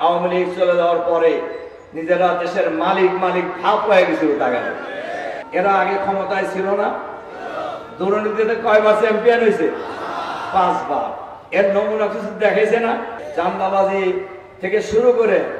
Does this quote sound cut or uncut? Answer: cut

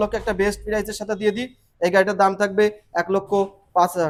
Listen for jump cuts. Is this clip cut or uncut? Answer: uncut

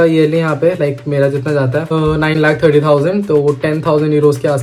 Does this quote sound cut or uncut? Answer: uncut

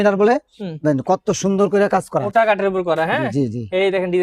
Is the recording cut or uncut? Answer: cut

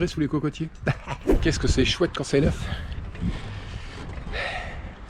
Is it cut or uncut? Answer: cut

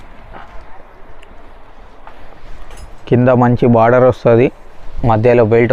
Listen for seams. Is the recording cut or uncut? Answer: uncut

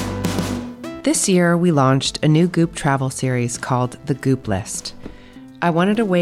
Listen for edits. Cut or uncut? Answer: cut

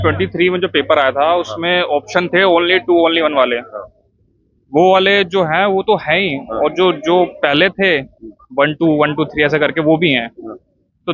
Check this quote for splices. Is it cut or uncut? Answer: uncut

